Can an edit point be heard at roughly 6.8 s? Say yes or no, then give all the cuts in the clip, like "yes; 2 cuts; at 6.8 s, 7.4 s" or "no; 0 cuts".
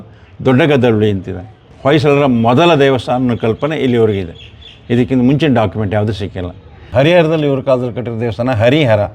yes; 2 cuts; at 1.7 s, 6.8 s